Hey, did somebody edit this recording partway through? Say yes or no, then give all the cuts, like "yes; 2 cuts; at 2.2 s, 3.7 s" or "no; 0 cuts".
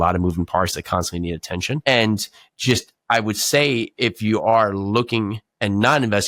no; 0 cuts